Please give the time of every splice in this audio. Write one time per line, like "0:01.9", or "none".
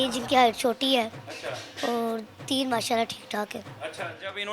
none